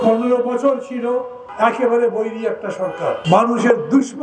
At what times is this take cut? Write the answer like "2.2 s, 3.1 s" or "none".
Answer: 1.4 s, 3.2 s

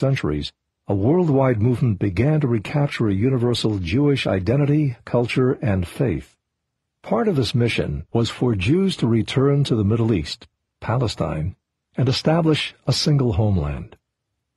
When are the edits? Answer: 9.1 s

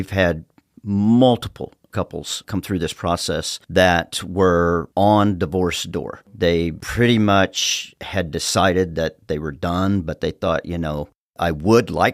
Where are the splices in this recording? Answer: 1.8 s, 3.6 s

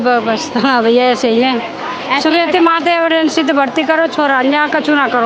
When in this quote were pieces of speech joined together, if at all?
none

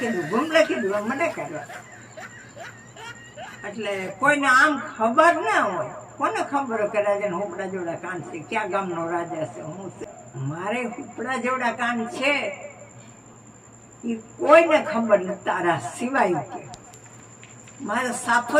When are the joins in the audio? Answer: 10.0 s

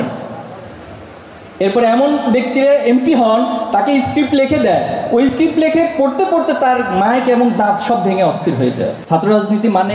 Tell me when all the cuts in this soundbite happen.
9.0 s

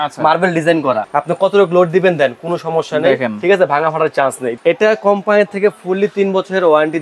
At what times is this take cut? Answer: 1.0 s, 4.5 s

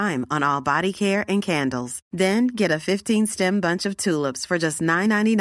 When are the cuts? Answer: none

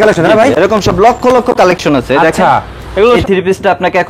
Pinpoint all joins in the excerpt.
3.2 s

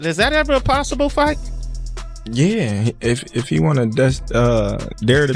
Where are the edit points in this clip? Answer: none

